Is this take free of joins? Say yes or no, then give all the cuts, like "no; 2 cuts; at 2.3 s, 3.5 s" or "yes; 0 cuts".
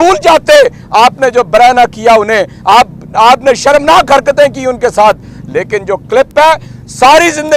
yes; 0 cuts